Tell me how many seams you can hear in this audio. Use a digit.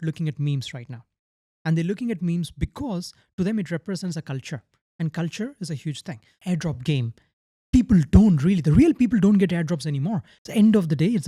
2